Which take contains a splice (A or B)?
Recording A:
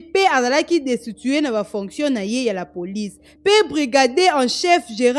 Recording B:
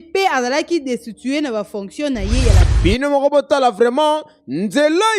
B